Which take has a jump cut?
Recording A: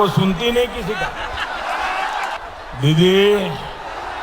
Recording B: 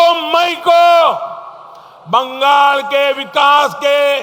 A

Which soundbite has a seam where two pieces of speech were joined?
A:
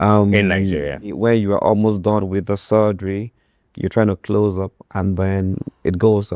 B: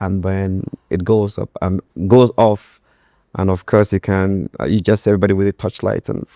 A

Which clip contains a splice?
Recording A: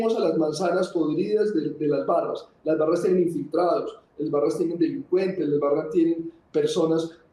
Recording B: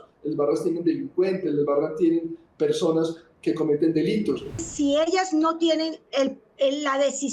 B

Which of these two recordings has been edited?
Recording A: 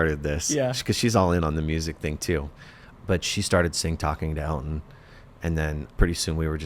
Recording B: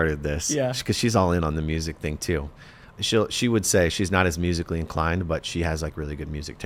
A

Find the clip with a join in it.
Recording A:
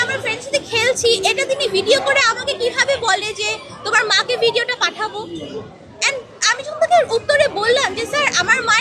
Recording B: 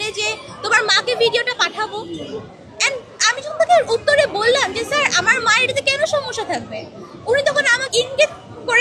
B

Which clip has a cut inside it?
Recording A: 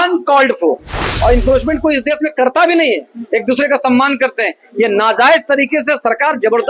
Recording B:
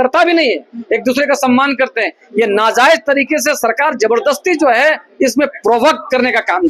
A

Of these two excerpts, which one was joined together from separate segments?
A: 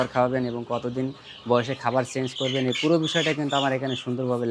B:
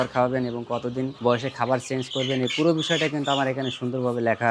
B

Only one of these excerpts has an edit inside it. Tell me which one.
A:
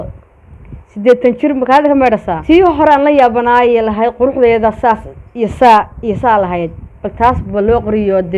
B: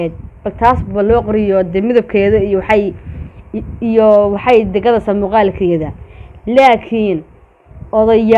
A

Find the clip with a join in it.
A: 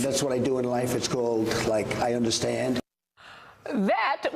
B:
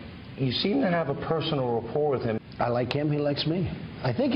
A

